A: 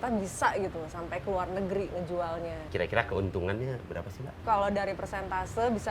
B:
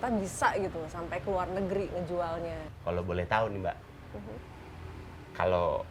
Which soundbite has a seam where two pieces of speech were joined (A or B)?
A